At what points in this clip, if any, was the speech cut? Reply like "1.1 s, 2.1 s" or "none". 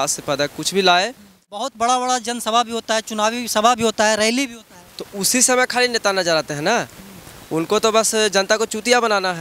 1.7 s